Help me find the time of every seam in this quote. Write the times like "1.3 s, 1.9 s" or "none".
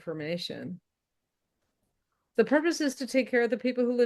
2.3 s